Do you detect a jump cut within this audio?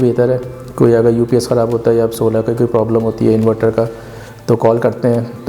no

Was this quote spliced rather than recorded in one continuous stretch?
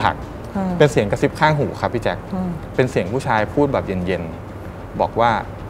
no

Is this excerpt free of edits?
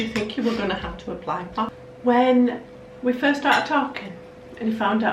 no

